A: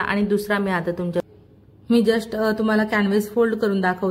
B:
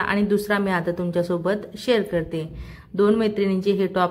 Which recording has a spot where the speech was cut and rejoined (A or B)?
A